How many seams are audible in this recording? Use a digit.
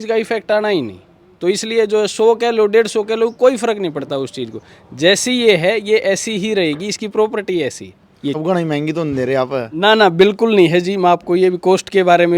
1